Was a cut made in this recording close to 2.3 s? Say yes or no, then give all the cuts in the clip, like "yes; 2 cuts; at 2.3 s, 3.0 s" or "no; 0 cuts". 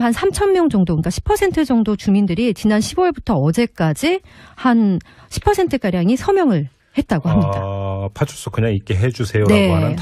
yes; 1 cut; at 2.3 s